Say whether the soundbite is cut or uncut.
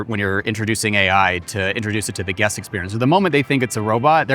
cut